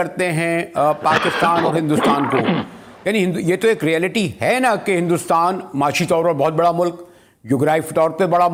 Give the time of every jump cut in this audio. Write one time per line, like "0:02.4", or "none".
none